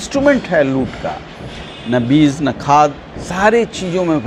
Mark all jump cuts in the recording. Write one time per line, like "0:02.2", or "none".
none